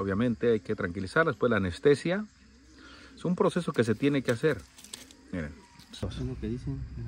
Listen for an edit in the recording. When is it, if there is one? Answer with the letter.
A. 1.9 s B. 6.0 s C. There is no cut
B